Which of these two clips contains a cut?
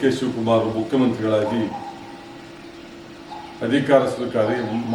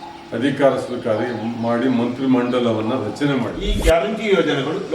second; 1 cut; at 3.6 s

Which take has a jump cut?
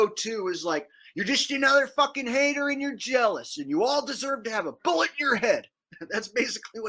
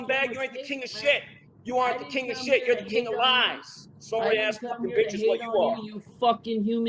first; 1 cut; at 5.9 s

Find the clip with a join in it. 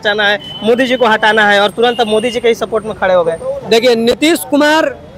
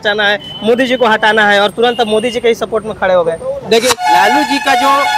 second; 1 cut; at 4.0 s

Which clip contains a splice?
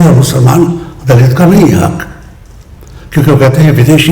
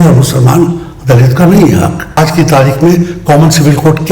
second; 1 cut; at 2.2 s

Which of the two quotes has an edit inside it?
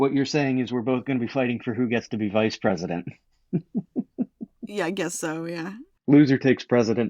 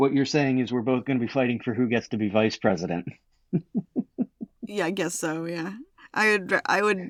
first; 1 cut; at 5.9 s

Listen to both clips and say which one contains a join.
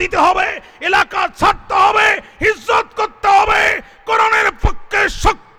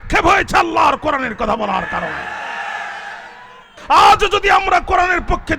second; 1 cut; at 3.7 s

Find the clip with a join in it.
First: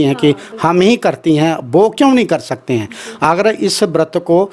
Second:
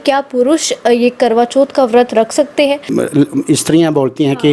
second; 1 cut; at 2.9 s

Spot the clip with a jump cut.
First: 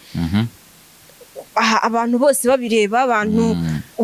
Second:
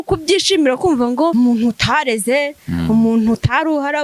second; 1 cut; at 1.3 s

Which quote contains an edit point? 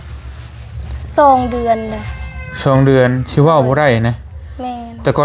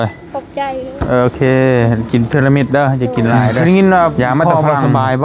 second; 1 cut; at 3.5 s

